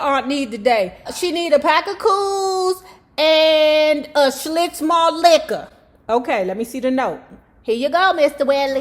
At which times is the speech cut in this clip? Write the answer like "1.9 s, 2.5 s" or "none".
none